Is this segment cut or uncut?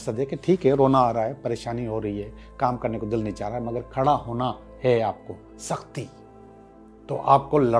uncut